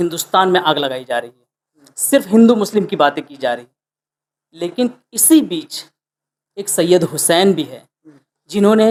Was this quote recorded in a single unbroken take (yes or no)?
yes